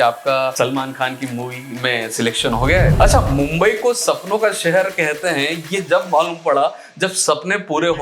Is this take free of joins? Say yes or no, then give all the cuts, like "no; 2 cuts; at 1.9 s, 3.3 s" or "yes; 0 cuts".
no; 1 cut; at 2.9 s